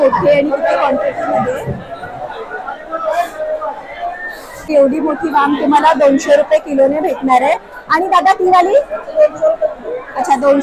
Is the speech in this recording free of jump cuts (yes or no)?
yes